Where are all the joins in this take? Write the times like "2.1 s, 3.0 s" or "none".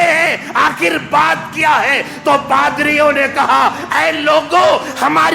none